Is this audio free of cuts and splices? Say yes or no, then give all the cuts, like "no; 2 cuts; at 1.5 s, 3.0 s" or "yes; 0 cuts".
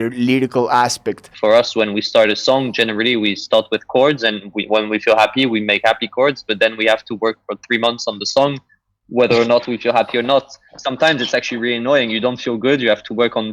no; 1 cut; at 1.3 s